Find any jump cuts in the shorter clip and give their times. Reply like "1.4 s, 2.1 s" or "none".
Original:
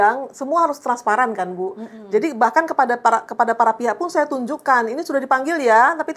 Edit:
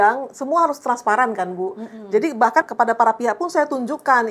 2.7 s

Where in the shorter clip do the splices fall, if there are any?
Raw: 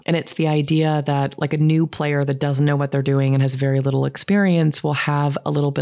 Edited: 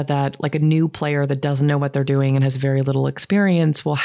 none

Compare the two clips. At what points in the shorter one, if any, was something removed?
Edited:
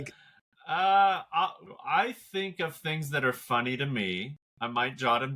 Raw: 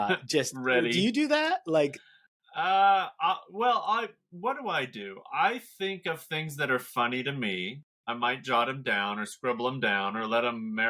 1.6 s

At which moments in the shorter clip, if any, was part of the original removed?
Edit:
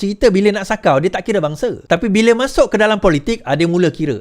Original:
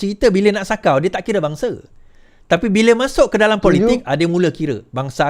1.8 s

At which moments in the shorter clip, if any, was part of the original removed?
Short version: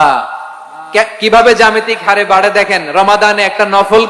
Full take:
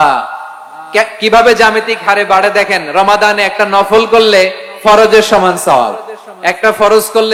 none

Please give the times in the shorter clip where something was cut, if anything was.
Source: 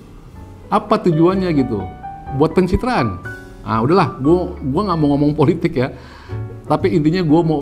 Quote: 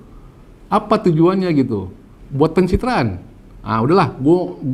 none

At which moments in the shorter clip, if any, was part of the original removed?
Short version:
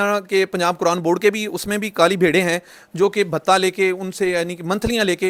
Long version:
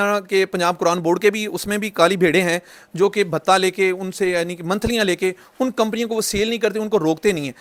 none

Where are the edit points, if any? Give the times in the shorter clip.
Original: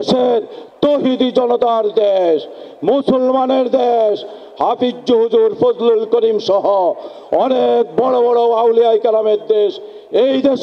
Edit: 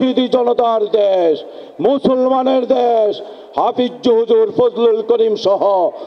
none

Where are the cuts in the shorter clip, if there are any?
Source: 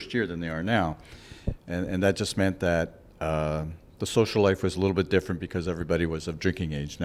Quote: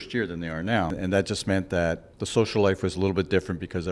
0.9 s, 2.1 s

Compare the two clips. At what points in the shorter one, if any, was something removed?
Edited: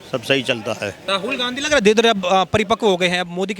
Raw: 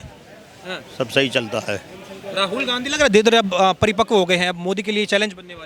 1.0 s

